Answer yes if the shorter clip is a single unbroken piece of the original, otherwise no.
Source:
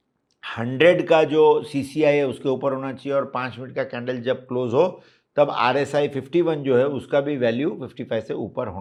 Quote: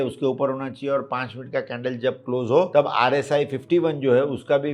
no